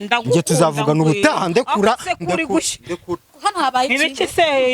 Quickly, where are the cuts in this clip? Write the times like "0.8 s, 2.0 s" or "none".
3.4 s

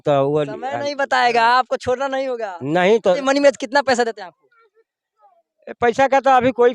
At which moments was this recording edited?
3.2 s

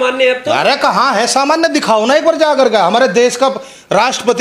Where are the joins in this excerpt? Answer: none

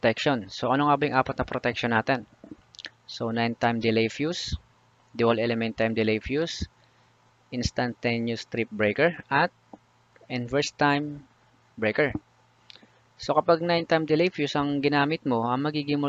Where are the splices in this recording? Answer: none

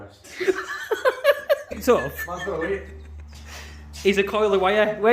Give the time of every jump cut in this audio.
1.7 s

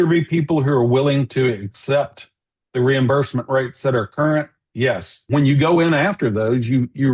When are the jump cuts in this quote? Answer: 5.1 s

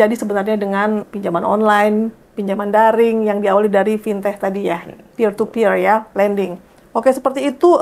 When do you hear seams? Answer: 1.0 s

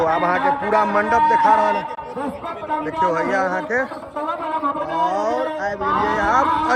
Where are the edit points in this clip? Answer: none

